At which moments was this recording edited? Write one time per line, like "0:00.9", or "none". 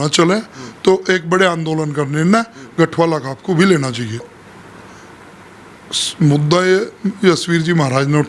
0:04.3